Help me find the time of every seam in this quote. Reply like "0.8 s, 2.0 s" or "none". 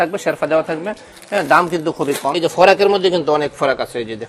2.4 s